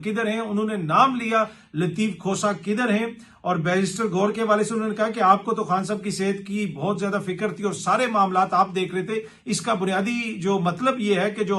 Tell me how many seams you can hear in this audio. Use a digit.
0